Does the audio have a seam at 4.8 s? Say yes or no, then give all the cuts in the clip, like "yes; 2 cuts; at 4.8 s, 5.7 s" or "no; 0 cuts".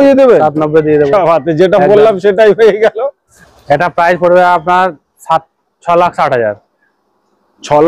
no; 1 cut; at 3.4 s